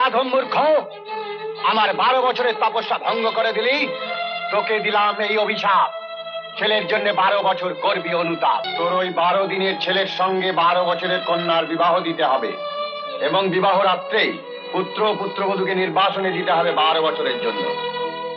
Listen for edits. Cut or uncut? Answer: cut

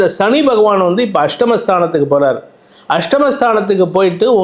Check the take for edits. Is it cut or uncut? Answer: uncut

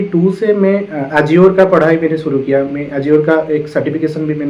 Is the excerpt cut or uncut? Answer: uncut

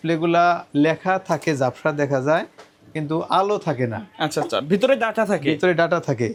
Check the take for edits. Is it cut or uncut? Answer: uncut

